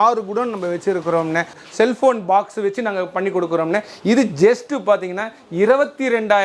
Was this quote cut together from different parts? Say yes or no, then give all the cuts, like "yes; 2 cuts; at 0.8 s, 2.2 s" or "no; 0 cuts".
yes; 1 cut; at 1.5 s